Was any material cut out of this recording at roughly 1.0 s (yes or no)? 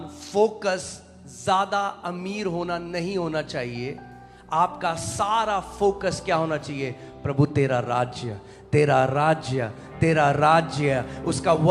no